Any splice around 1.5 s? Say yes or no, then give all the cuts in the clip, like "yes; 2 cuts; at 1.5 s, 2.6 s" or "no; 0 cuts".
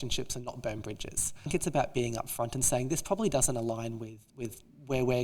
yes; 1 cut; at 1.5 s